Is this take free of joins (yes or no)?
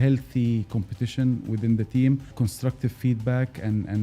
no